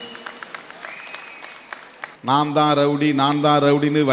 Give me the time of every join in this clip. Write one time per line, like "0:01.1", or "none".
0:01.7